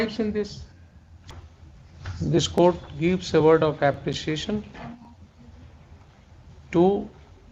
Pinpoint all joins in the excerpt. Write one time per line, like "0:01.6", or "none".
0:01.4